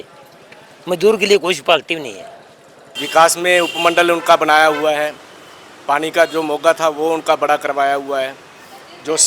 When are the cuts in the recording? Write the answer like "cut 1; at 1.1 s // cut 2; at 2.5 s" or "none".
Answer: cut 1; at 2.9 s